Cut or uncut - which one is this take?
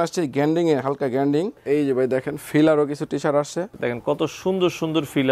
cut